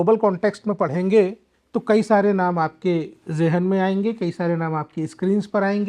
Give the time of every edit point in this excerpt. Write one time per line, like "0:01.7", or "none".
none